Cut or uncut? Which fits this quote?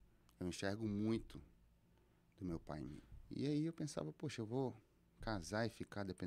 cut